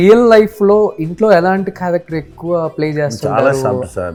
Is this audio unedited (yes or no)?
yes